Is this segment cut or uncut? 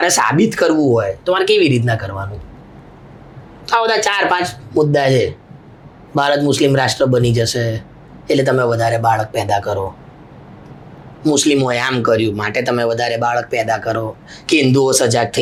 uncut